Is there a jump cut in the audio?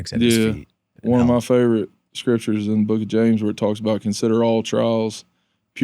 yes; 1 cut; at 0.9 s

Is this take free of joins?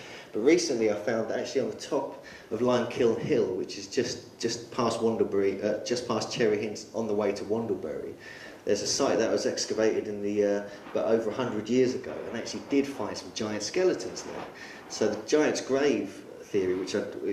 no; 1 cut; at 1.2 s

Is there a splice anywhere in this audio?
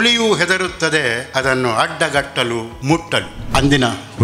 yes; 2 cuts; at 1.2 s, 3.2 s

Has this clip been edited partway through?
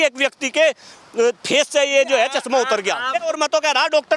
yes; 1 cut; at 3.3 s

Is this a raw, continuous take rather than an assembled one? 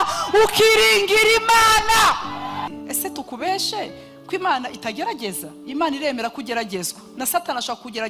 no; 1 cut; at 2.7 s

